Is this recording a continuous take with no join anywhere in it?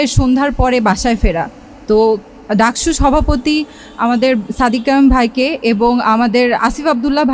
yes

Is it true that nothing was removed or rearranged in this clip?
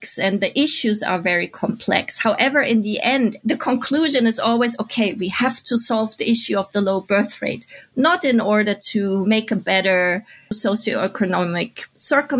yes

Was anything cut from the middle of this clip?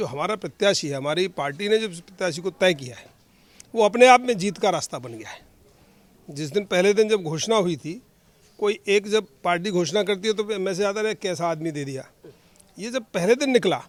no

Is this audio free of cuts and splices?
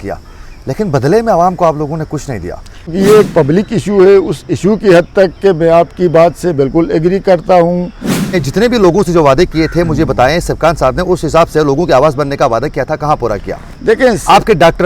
no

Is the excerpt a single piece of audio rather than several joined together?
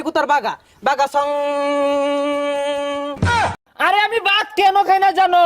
no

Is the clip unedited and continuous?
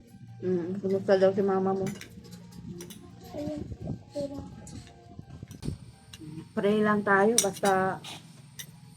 no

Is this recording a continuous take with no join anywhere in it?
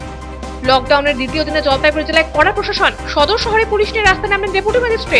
yes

